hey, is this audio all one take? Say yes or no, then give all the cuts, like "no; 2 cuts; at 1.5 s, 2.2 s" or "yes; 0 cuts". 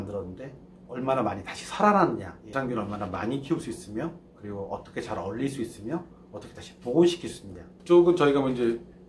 yes; 0 cuts